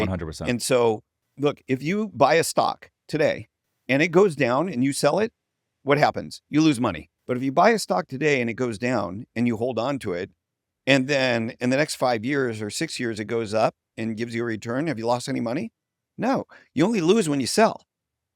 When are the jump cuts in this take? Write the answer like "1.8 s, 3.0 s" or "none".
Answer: 1.2 s, 7.1 s